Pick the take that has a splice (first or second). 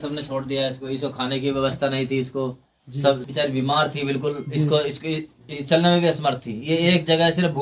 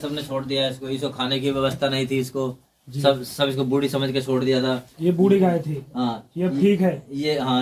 first